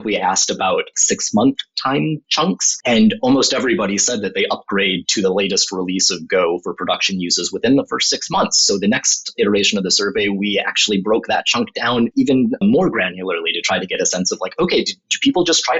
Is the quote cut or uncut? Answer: cut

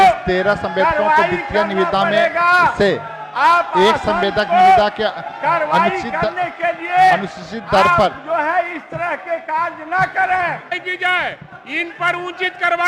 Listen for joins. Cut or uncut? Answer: uncut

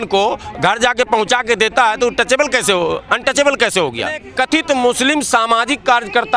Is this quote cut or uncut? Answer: cut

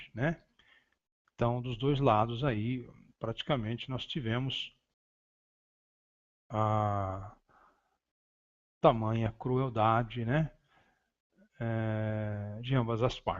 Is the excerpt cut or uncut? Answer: uncut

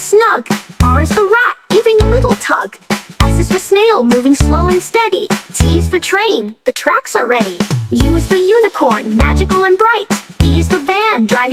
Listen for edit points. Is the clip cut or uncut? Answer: uncut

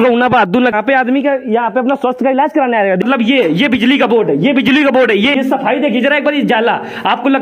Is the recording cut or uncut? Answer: cut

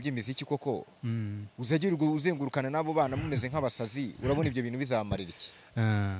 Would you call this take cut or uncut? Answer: uncut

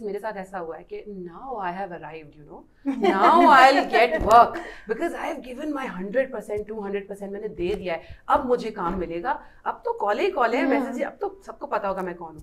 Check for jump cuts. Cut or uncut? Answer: uncut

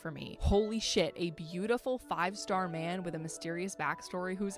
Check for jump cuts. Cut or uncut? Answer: uncut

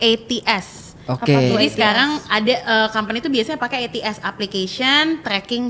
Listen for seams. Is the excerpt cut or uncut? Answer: uncut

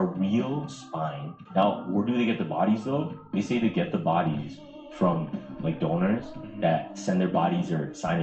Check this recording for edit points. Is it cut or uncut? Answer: cut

